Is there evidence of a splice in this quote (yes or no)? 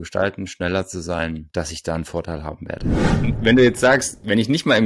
yes